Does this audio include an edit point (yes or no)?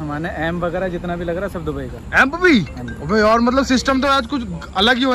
no